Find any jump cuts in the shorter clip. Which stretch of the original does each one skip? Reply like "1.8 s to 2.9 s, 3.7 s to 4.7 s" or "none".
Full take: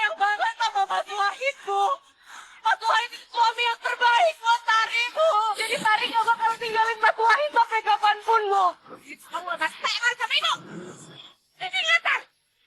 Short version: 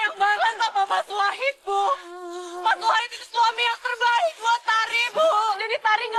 none